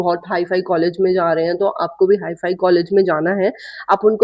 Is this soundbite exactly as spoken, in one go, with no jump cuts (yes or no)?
yes